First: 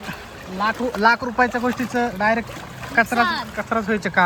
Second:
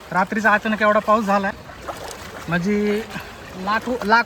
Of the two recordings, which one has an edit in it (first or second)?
second